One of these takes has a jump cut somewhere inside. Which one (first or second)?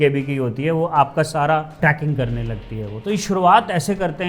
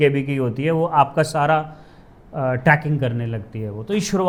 first